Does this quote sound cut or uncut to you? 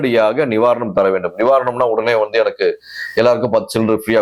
uncut